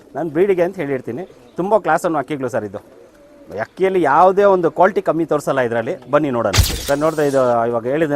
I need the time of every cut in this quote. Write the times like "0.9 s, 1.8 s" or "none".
6.7 s

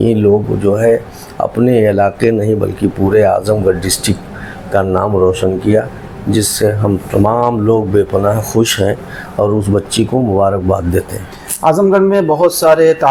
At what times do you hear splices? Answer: none

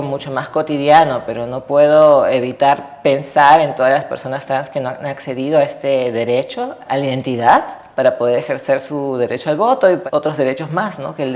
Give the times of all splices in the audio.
6.8 s, 10.0 s

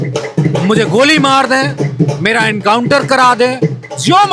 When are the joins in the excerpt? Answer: none

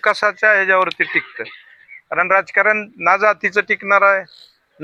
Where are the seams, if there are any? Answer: none

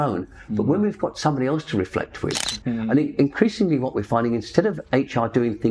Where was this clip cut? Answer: 2.4 s

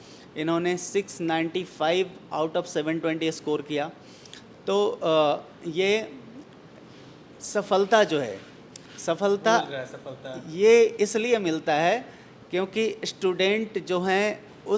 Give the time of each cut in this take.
none

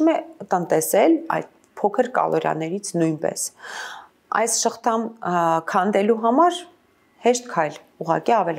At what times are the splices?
none

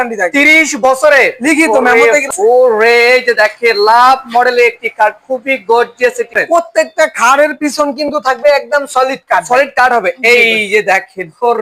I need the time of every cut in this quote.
2.3 s, 6.4 s

